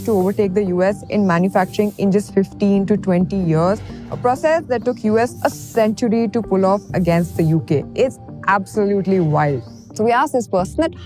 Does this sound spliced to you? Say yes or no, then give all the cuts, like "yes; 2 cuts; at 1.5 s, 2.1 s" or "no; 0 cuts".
no; 0 cuts